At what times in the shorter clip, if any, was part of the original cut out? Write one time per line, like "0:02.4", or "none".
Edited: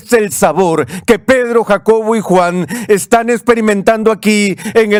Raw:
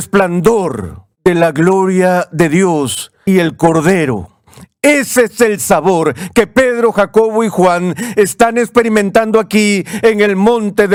none